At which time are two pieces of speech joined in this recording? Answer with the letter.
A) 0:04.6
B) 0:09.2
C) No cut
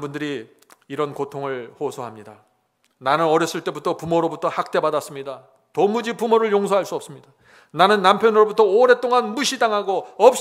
C